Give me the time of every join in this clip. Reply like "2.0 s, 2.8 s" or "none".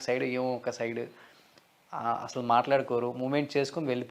none